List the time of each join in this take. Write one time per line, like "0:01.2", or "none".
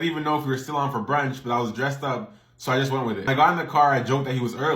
0:03.3

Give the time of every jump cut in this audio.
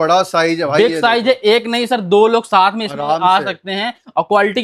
none

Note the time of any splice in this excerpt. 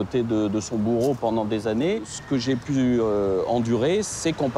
0:02.1

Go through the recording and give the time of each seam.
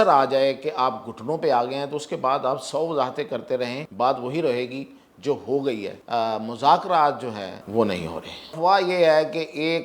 0:03.8
0:05.9
0:07.6
0:08.6

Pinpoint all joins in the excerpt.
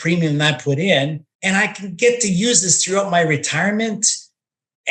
0:01.3

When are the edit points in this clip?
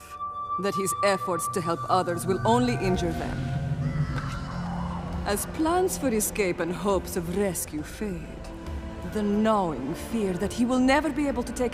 0:05.2

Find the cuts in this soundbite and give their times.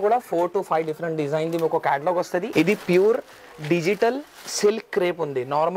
0:02.5

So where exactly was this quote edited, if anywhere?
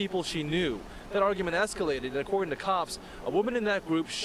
0:01.4

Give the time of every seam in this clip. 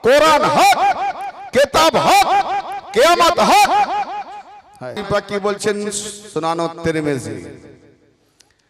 0:05.0

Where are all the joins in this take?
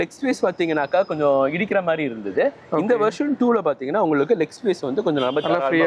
none

